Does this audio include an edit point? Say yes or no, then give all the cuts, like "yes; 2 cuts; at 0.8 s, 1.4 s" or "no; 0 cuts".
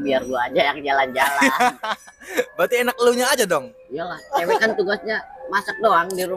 no; 0 cuts